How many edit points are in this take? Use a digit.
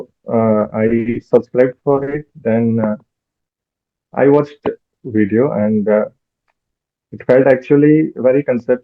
1